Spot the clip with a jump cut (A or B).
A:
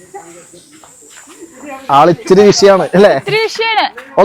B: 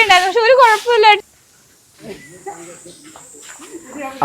B